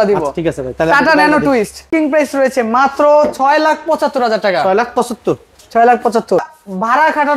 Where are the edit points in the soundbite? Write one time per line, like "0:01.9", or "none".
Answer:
0:01.8